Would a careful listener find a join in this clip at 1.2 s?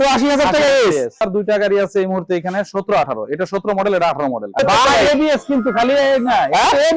yes; 2 cuts; at 1.2 s, 4.6 s

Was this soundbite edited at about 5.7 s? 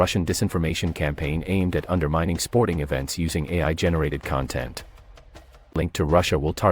yes; 1 cut; at 5.7 s

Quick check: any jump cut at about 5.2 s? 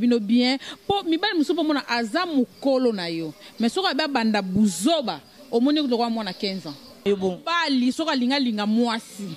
no; 1 cut; at 7.0 s

